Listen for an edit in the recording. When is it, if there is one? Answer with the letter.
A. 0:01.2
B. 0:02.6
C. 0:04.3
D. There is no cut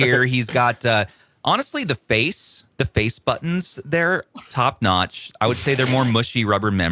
D